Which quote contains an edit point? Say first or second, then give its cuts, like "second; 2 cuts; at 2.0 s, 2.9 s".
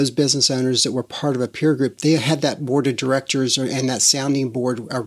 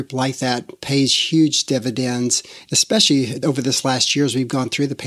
second; 1 cut; at 3.4 s